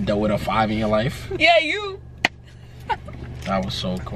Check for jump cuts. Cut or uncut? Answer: cut